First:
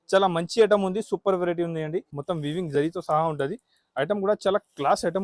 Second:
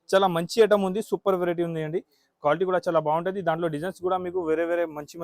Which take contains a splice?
first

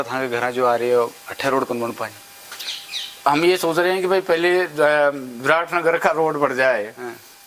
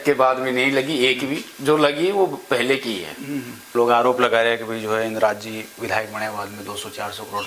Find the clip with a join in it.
second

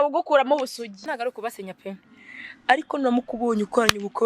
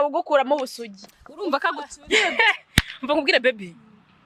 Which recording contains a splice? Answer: first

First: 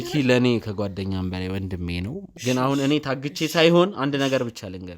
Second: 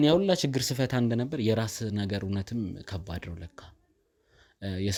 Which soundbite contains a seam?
first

